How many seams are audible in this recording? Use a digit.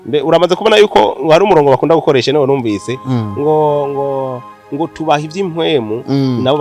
0